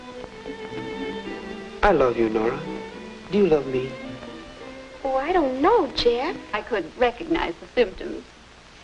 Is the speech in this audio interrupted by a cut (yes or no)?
no